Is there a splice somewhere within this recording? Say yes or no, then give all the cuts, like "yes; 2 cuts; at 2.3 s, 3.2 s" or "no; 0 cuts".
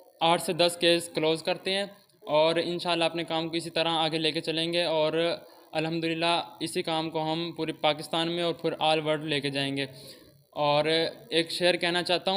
no; 0 cuts